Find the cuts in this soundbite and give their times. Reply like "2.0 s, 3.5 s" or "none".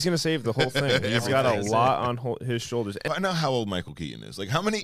3.0 s